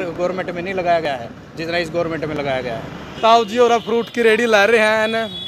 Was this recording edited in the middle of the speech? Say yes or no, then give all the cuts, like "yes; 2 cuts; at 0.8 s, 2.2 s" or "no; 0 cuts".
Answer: no; 0 cuts